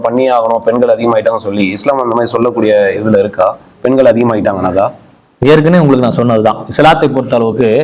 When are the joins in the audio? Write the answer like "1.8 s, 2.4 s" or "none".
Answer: none